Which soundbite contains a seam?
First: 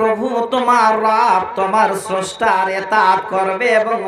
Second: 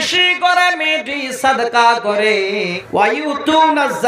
second; 1 cut; at 2.8 s

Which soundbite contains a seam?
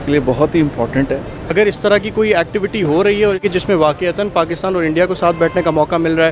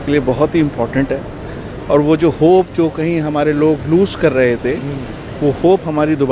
first; 2 cuts; at 1.5 s, 3.4 s

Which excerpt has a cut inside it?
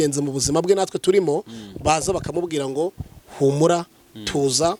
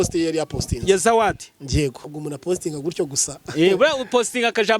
second; 1 cut; at 2.0 s

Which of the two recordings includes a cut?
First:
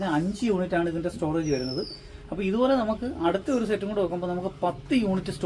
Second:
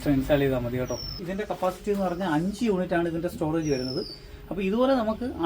second; 1 cut; at 1.2 s

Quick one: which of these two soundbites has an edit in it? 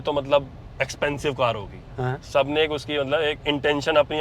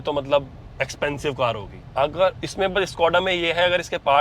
second; 1 cut; at 1.8 s

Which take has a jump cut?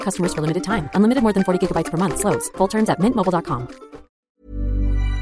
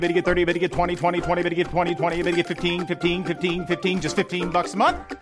first; 1 cut; at 4.3 s

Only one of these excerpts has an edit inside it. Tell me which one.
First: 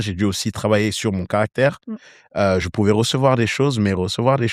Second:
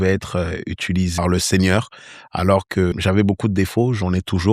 second; 2 cuts; at 1.1 s, 2.9 s

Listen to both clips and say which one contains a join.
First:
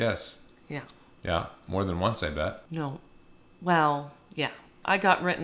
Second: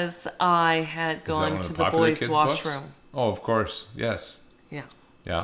first; 2 cuts; at 2.6 s, 4.7 s

